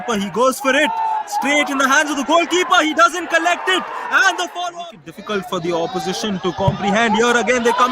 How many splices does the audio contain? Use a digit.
1